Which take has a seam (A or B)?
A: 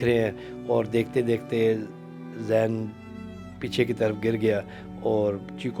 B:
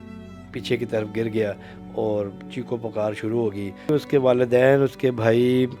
B